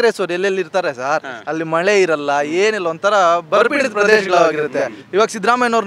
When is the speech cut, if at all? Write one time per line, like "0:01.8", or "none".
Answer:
none